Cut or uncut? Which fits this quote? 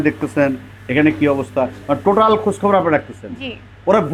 uncut